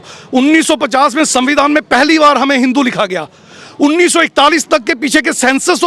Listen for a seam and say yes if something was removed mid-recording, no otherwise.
no